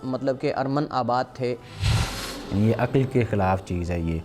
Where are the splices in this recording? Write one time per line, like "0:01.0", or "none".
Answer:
0:01.9